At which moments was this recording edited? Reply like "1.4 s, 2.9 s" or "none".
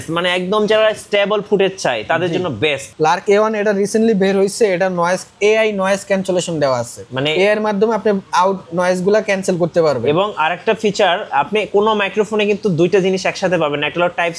2.8 s